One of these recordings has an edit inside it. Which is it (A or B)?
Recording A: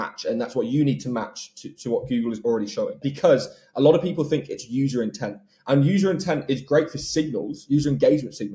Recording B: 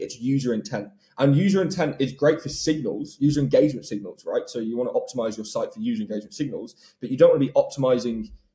A